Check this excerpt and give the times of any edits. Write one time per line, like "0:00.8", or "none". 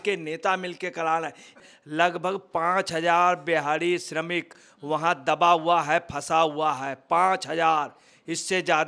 0:01.7